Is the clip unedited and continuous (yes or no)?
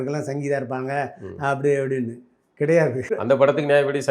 no